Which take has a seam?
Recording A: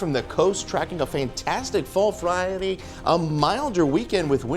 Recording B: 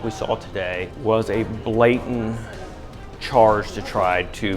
B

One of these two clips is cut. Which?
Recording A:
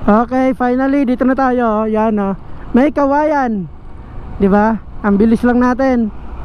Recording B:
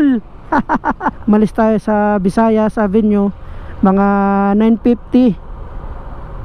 B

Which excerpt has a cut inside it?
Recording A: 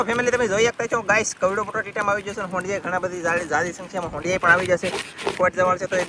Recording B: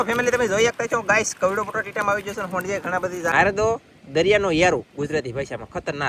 B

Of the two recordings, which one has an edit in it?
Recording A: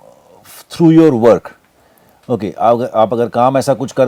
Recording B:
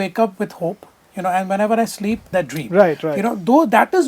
B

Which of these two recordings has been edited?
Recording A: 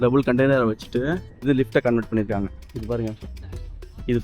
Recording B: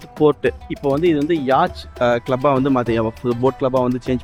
A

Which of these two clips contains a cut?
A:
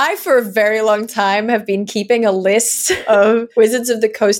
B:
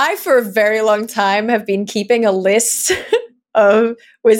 A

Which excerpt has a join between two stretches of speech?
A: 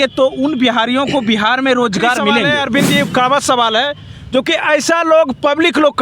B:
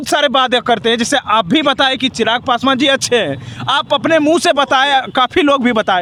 A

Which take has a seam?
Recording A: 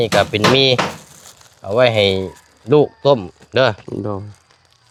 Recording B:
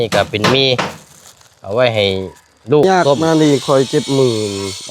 B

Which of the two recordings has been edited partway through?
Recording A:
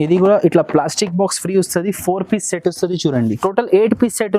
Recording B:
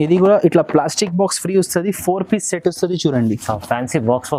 A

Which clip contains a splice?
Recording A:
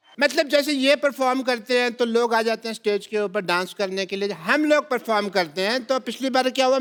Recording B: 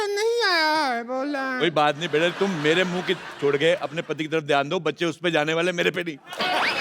B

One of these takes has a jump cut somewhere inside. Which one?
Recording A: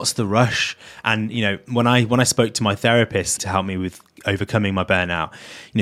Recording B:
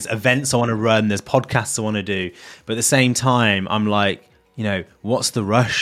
A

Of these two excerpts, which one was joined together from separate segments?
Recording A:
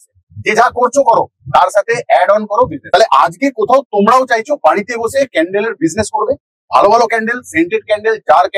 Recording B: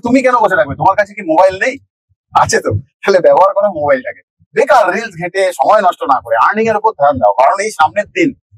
A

